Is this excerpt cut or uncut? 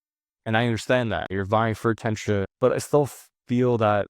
cut